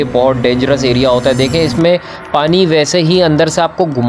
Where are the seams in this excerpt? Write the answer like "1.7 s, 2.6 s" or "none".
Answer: none

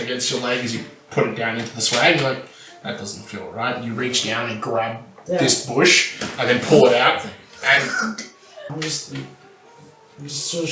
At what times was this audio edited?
8.7 s

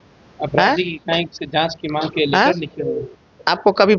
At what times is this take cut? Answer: none

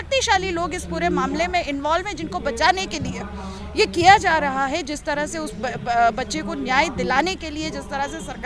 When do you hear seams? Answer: none

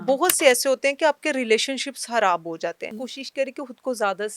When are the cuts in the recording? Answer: 3.0 s

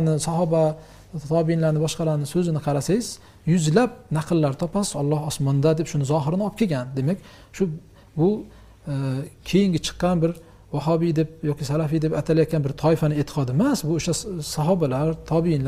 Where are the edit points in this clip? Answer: none

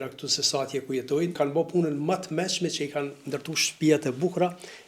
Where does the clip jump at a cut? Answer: 1.4 s

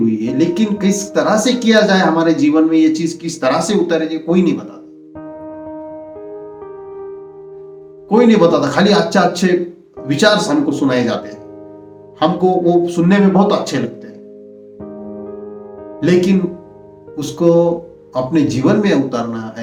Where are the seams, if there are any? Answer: none

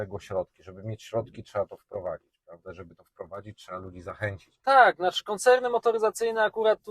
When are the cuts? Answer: 4.5 s

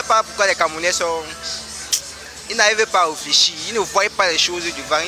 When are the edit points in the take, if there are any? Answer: none

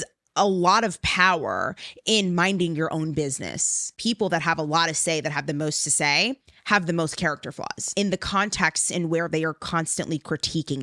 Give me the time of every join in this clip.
4.0 s, 7.9 s

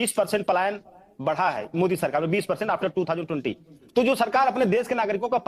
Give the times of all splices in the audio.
none

